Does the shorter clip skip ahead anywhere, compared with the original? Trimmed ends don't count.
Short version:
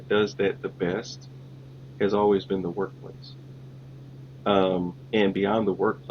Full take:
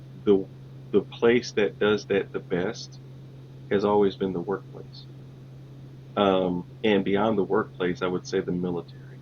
no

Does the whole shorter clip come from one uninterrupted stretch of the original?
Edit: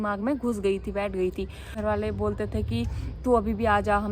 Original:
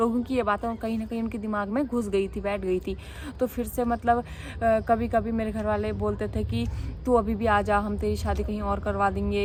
no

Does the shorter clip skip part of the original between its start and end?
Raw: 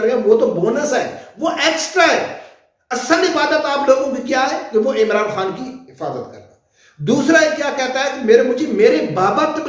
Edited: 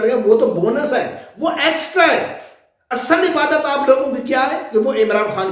no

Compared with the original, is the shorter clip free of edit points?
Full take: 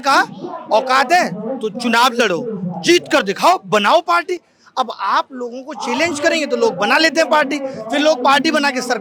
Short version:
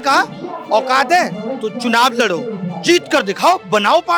yes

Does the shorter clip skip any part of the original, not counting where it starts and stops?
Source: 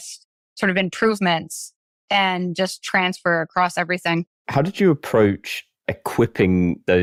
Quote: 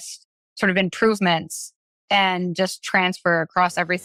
no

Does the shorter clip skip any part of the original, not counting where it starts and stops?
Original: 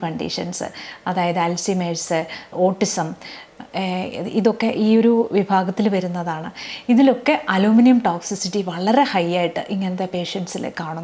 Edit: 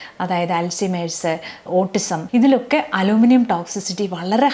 yes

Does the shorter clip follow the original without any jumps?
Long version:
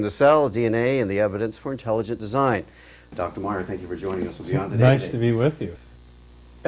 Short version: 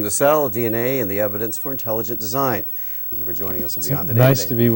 no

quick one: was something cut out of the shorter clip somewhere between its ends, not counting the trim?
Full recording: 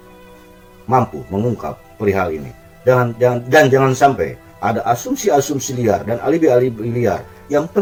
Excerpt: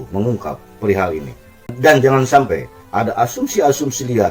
yes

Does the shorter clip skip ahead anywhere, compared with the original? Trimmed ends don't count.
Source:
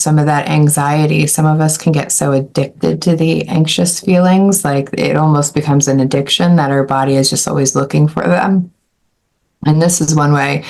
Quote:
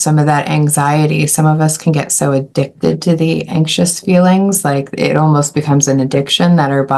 no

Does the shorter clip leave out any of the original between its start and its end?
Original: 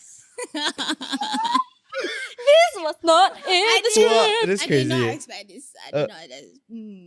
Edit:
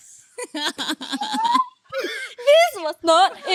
no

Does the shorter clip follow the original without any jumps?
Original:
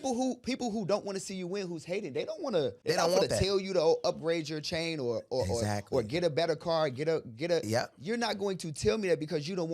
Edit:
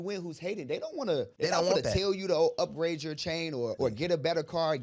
no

